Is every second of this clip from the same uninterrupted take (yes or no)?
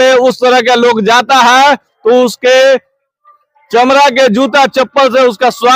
yes